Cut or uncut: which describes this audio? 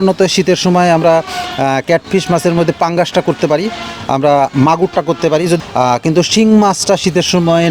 cut